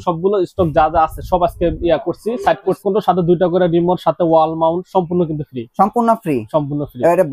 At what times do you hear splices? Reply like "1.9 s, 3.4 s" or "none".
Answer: 2.8 s

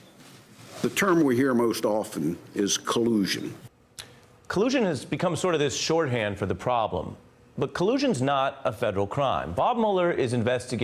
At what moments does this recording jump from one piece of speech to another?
2.6 s

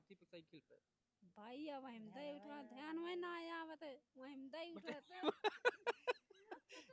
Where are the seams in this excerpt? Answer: none

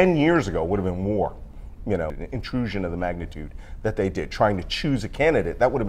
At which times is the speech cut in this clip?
2.2 s

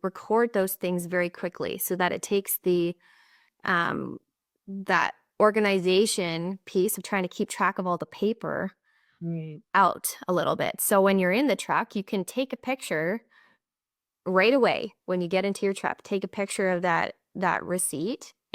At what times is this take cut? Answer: none

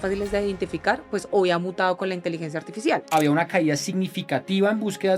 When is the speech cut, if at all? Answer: 3.0 s

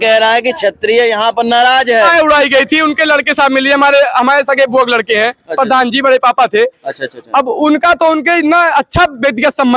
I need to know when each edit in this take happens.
2.1 s

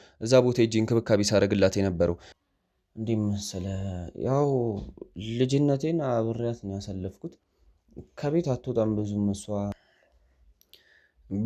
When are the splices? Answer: 2.3 s, 9.7 s

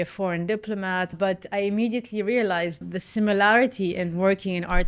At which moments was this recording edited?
1.1 s, 2.9 s

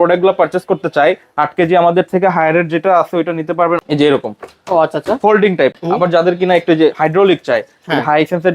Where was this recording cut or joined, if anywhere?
3.8 s, 5.8 s

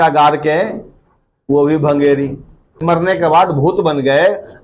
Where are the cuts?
2.8 s

